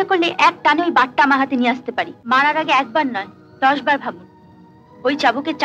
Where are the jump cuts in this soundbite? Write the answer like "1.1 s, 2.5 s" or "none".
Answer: 2.2 s